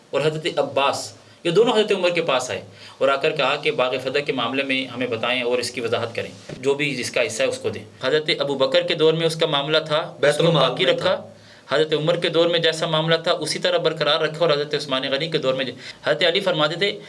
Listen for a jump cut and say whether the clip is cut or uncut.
cut